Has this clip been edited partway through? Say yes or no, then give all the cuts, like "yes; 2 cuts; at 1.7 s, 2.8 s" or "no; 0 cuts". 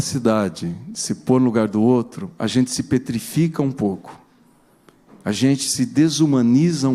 no; 0 cuts